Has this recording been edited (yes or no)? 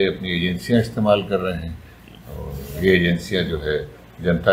no